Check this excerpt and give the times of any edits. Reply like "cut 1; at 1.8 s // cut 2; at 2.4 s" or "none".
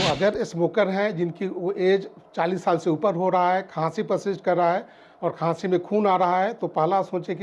none